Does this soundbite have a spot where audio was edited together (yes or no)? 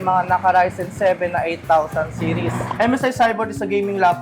yes